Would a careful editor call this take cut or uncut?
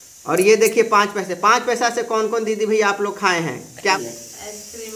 cut